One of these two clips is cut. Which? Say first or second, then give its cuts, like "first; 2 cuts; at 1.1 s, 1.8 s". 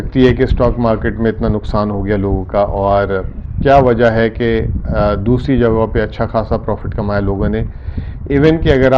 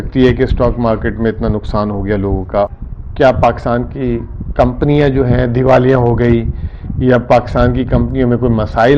second; 1 cut; at 2.7 s